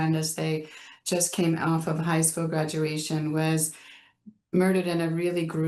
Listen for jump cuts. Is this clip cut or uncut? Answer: uncut